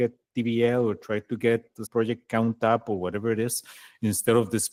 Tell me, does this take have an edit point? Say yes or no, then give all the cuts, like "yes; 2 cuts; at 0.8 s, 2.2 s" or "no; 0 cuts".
no; 0 cuts